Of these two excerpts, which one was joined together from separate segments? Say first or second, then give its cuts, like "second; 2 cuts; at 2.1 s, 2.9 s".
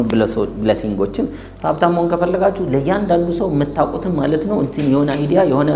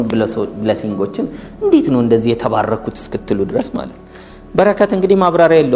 first; 1 cut; at 1.4 s